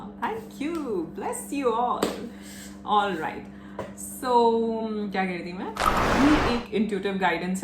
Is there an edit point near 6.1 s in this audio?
yes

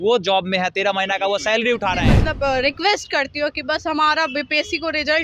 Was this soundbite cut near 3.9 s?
no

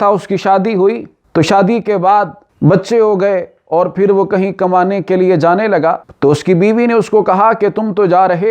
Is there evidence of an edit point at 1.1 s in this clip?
yes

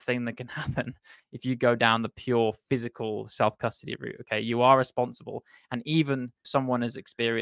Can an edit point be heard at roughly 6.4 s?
no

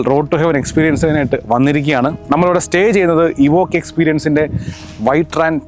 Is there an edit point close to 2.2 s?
yes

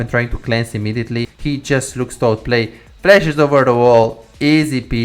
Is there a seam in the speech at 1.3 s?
yes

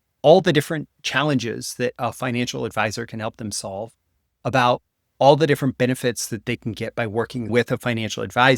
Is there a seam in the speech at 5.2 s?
no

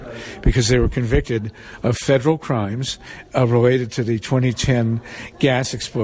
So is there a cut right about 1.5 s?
no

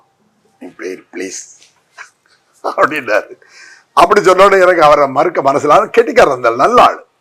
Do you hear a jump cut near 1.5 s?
no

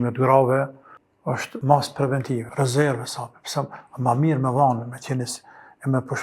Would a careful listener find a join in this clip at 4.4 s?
no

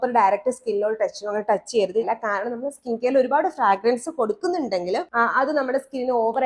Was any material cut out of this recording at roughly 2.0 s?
yes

